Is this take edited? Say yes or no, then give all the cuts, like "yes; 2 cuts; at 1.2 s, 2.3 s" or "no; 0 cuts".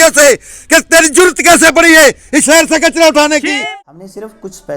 yes; 1 cut; at 3.6 s